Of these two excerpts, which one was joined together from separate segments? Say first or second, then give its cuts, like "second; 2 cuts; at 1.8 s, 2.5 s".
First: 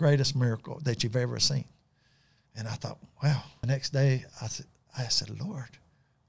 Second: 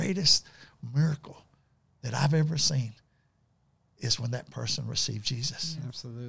first; 1 cut; at 3.7 s